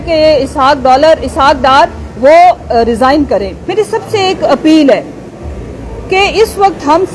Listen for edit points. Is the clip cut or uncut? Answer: cut